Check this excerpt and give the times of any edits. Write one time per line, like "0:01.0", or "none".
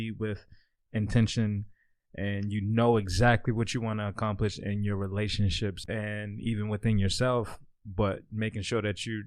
0:05.8

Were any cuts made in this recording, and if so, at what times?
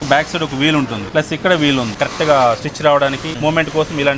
0:01.0
0:02.0
0:03.3

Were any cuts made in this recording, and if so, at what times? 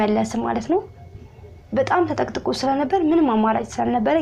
none

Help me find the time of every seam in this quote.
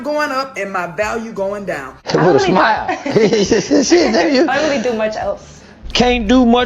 0:01.9

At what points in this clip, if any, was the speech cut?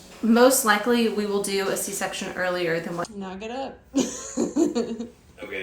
0:03.1

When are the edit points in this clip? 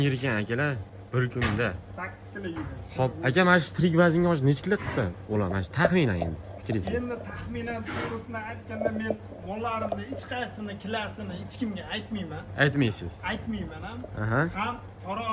none

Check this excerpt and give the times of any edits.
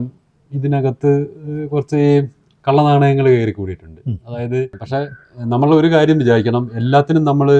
0:04.7

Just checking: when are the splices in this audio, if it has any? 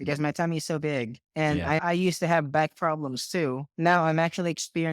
0:01.8
0:03.7

